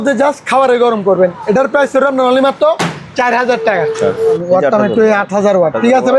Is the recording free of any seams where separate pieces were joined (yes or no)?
no